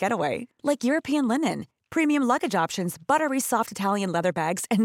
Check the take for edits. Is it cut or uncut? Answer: uncut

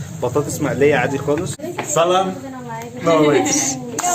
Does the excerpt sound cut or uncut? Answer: cut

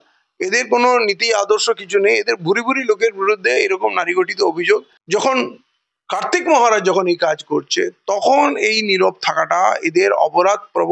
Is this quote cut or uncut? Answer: cut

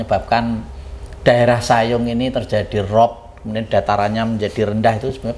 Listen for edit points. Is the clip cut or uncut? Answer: uncut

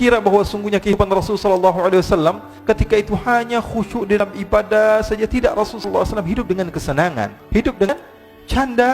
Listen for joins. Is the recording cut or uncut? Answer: cut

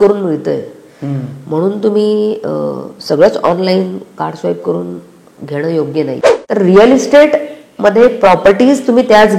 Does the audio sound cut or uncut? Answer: cut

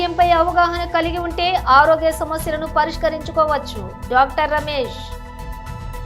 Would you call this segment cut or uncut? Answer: cut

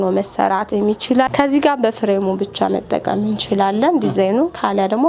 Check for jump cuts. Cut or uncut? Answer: cut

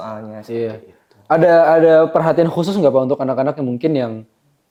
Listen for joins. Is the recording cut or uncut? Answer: uncut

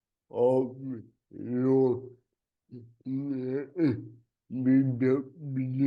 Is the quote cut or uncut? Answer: uncut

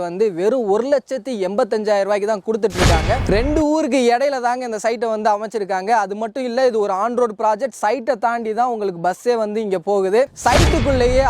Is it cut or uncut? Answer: cut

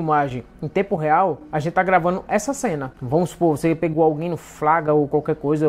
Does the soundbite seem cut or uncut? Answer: uncut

